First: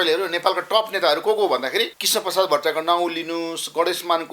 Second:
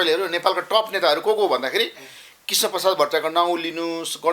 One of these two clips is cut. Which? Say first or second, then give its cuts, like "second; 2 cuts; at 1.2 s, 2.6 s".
first; 1 cut; at 2.0 s